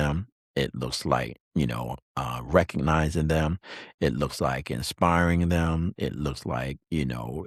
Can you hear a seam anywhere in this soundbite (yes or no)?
no